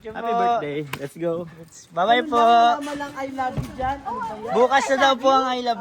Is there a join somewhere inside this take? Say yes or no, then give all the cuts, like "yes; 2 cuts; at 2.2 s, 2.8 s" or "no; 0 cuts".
no; 0 cuts